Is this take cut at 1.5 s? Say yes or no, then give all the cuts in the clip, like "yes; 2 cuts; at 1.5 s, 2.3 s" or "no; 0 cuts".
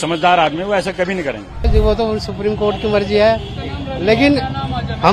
yes; 1 cut; at 1.5 s